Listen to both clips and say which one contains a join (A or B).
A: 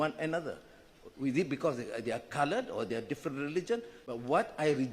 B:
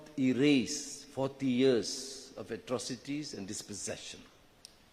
A